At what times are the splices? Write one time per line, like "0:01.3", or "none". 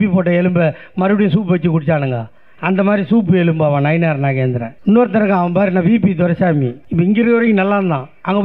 0:04.7
0:06.8